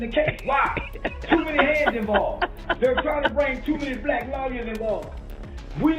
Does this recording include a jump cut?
no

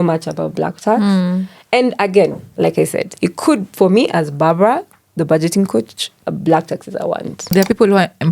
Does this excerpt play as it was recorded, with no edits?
no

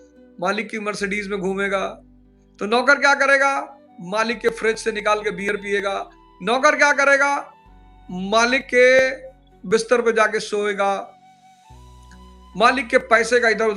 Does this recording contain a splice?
no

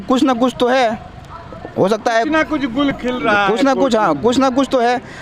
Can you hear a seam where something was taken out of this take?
no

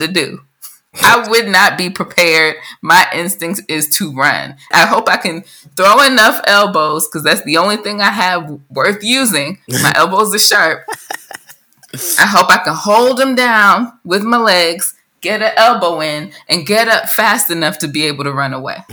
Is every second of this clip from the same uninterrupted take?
no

